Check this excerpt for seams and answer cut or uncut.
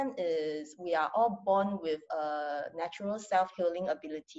uncut